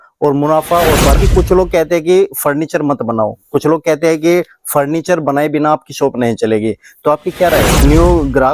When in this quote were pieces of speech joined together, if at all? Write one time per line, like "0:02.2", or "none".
0:01.1
0:07.7